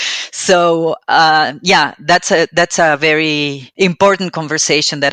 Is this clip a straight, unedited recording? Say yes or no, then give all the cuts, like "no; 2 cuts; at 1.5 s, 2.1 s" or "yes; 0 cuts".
no; 1 cut; at 3.6 s